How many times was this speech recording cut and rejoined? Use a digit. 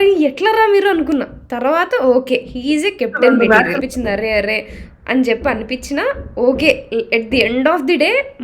1